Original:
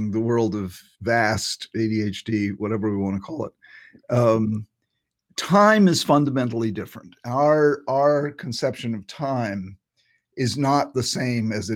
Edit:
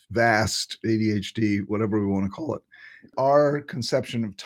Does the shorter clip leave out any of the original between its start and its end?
yes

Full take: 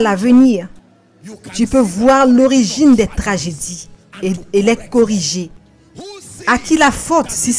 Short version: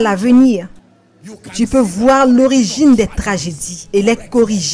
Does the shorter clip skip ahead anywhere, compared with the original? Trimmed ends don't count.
yes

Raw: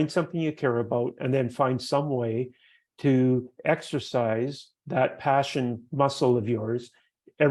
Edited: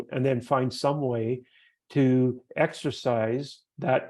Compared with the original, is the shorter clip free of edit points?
yes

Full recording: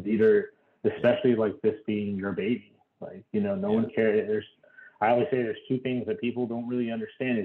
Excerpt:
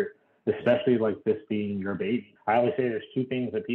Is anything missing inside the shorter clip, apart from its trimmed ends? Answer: yes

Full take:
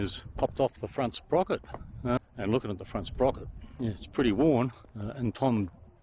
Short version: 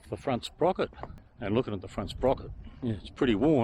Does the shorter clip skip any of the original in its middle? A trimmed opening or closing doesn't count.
yes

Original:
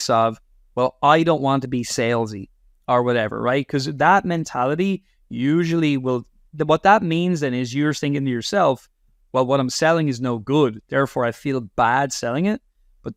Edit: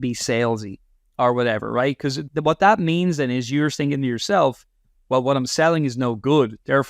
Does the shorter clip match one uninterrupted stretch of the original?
no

